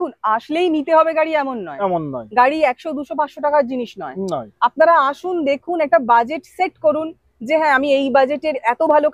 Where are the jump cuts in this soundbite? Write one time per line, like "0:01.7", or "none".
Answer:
none